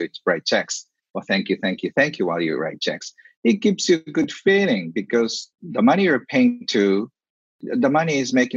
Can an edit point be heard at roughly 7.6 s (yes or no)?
yes